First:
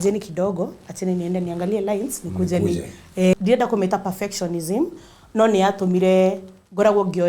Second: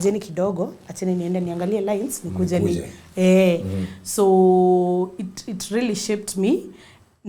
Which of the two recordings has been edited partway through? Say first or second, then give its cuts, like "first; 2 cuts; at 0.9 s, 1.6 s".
first; 1 cut; at 3.3 s